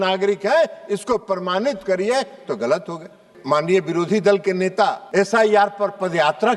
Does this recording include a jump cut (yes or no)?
yes